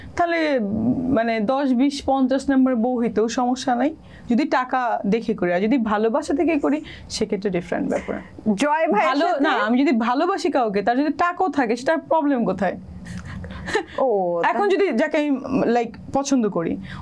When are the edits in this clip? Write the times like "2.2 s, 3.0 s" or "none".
none